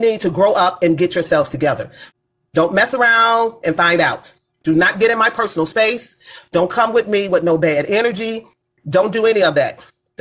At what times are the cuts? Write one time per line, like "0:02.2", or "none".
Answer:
0:01.9